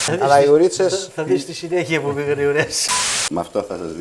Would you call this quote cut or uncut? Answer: cut